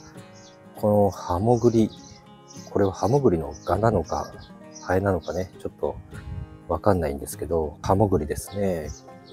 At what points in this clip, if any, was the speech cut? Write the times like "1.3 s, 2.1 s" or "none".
7.8 s